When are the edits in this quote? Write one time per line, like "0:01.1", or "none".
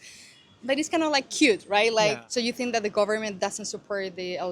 0:02.2